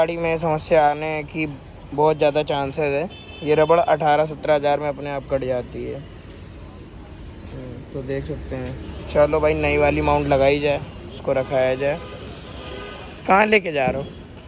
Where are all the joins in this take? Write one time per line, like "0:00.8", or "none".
none